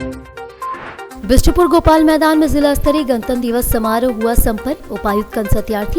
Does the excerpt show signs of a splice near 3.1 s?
no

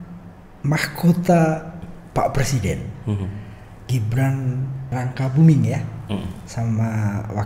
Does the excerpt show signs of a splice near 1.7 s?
no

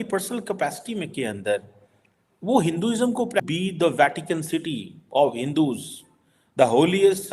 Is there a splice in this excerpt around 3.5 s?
yes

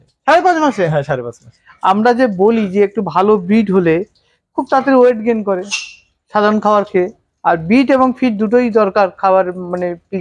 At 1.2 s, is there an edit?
no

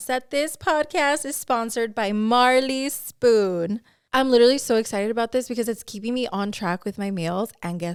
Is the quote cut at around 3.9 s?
no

